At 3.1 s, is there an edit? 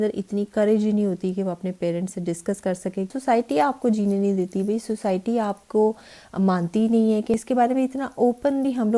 yes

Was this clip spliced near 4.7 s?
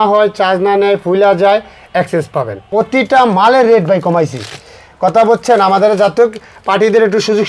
no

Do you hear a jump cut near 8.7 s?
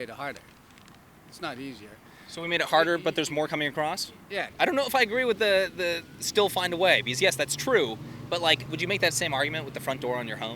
yes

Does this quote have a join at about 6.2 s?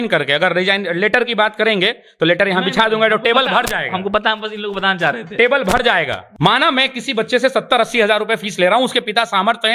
yes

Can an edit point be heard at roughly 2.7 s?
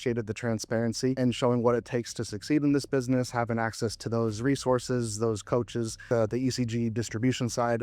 no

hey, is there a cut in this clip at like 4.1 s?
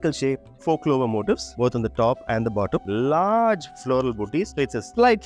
no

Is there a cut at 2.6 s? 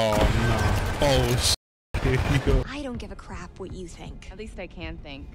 yes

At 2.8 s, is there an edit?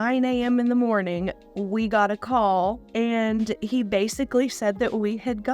yes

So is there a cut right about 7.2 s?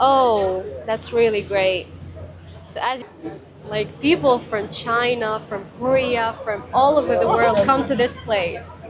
no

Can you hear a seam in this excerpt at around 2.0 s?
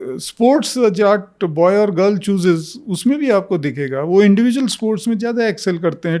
no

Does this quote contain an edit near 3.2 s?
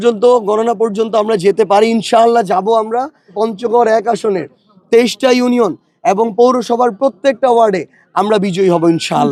no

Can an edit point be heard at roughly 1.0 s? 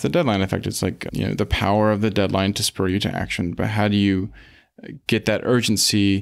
yes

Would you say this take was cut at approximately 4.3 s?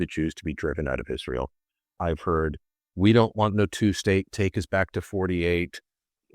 no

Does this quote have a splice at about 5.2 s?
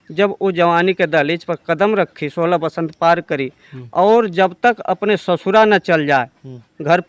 no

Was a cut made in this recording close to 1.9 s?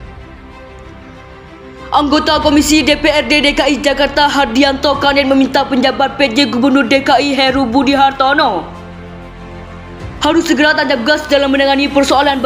yes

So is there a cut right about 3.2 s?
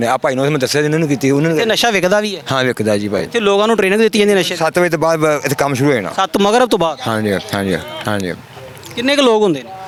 no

